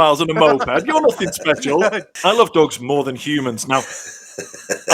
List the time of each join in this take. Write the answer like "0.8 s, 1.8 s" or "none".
2.1 s